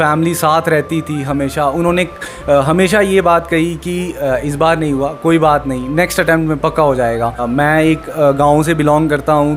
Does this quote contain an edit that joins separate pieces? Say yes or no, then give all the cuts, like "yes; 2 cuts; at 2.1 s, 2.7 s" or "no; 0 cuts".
yes; 1 cut; at 7.4 s